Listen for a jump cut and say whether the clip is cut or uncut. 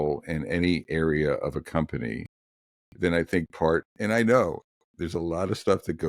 cut